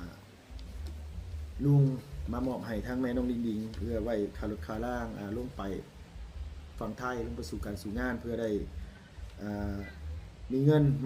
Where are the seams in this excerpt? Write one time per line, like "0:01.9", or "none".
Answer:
none

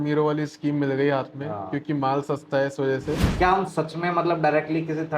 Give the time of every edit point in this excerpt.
0:03.3

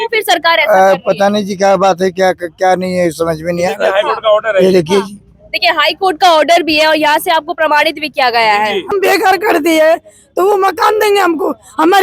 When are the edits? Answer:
0:08.9

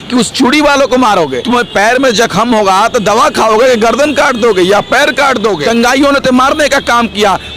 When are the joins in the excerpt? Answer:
0:01.4
0:05.6

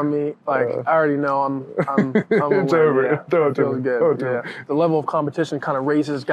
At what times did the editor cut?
0:04.6

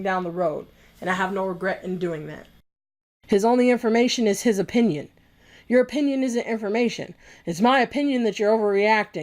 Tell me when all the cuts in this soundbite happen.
0:02.8

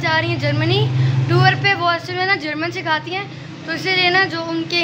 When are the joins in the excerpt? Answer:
none

